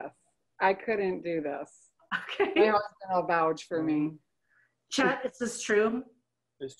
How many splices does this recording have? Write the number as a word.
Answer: zero